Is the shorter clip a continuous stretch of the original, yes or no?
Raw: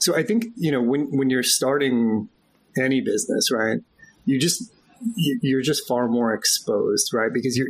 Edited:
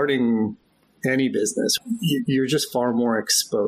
no